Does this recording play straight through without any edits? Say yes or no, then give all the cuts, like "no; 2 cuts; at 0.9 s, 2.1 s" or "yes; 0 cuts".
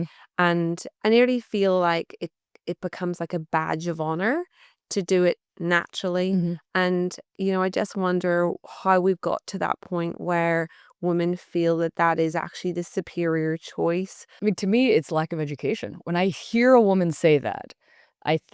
no; 2 cuts; at 0.9 s, 14.2 s